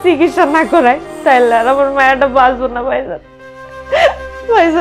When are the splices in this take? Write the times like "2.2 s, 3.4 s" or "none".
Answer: none